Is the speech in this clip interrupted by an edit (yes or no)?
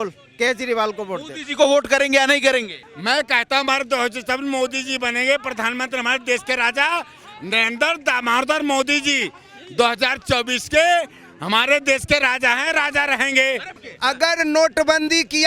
yes